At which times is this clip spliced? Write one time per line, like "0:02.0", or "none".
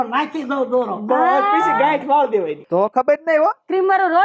0:02.6